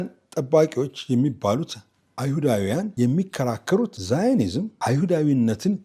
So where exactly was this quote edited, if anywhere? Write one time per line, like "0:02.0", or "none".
0:02.9
0:04.0
0:04.7